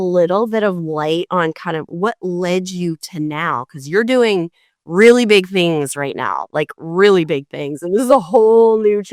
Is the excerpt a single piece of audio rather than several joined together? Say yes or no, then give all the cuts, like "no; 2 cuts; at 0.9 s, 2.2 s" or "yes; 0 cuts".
yes; 0 cuts